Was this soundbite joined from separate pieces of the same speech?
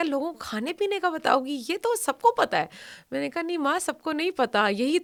no; 0 cuts

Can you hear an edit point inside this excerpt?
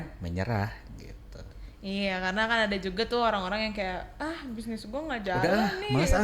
no; 0 cuts

